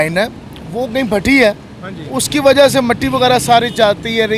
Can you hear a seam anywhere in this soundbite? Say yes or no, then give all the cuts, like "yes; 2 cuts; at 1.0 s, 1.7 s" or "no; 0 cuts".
no; 0 cuts